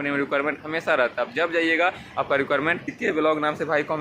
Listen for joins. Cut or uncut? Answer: cut